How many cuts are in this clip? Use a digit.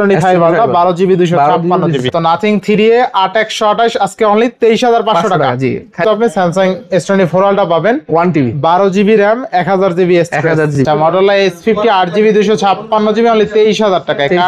3